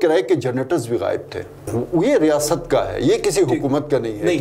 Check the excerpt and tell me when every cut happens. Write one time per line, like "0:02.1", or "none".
0:01.7